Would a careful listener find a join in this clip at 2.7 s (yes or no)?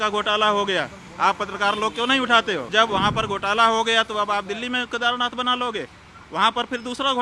yes